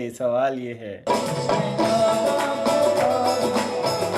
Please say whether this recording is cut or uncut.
cut